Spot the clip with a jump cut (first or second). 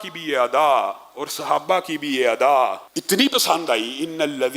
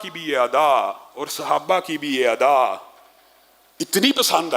first